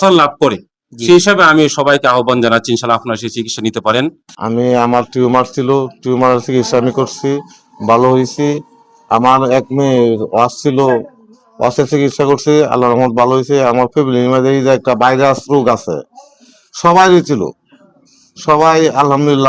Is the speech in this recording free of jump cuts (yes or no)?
no